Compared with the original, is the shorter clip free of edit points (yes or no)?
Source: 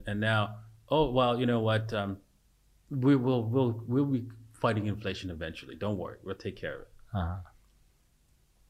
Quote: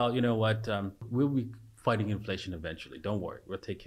no